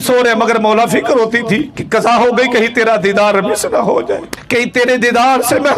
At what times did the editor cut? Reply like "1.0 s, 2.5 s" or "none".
1.8 s, 4.3 s